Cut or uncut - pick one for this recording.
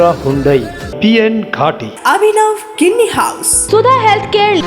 cut